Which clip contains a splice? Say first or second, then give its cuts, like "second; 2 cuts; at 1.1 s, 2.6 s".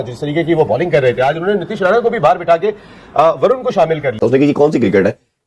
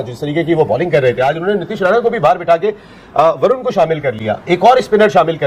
first; 1 cut; at 4.2 s